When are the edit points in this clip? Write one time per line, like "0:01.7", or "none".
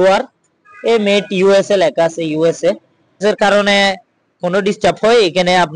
0:03.2